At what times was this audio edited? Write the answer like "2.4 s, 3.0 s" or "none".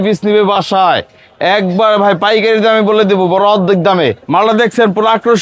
4.2 s